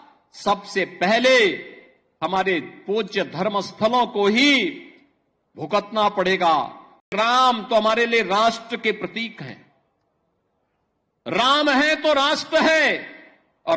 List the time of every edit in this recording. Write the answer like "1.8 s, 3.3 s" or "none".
7.1 s